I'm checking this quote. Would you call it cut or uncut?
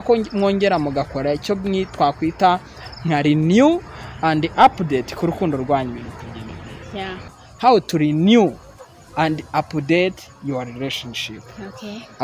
cut